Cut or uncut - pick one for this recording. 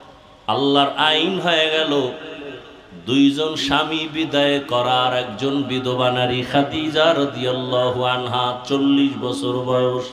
uncut